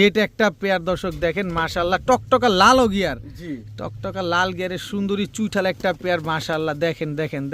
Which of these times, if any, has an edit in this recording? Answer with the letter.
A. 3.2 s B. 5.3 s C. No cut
C